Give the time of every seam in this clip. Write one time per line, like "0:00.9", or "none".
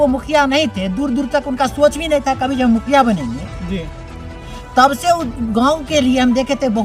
none